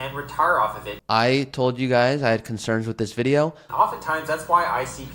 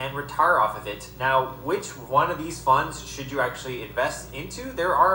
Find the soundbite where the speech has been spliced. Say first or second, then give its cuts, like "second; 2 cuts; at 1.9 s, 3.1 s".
first; 2 cuts; at 0.9 s, 3.6 s